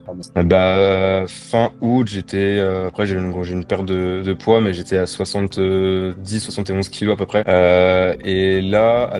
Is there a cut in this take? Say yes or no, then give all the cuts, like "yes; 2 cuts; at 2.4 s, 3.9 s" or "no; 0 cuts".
no; 0 cuts